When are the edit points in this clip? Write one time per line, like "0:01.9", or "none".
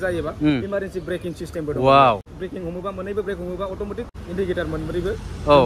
0:02.3
0:04.1